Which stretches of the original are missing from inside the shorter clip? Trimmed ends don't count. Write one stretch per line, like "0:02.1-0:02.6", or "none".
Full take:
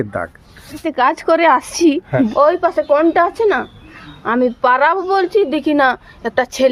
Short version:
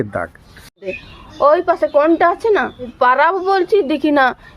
0:01.0-0:01.9
0:03.9-0:04.5